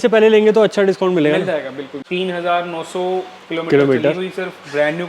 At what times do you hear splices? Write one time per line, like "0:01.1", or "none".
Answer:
0:02.0

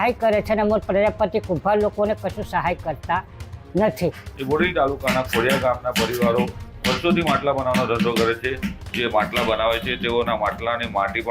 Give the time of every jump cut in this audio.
0:04.2
0:08.8

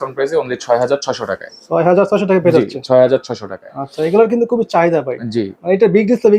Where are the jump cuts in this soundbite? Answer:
none

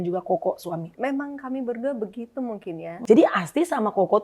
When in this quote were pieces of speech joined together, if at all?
0:00.9
0:02.9

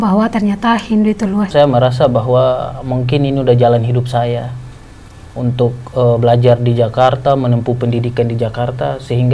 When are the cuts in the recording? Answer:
0:01.5

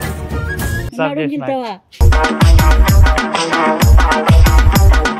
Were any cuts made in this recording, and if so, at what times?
0:00.9

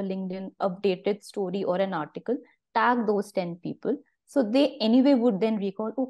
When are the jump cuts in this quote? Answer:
none

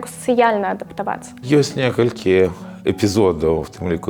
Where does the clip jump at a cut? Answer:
0:01.4

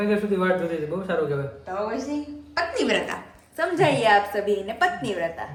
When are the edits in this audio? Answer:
none

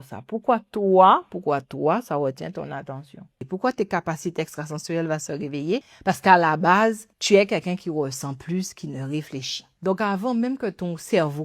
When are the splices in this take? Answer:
0:03.5
0:05.9
0:07.1
0:09.7

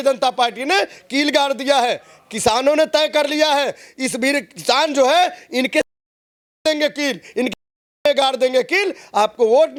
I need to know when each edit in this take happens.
none

